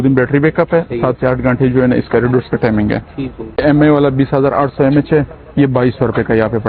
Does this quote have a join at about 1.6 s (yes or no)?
no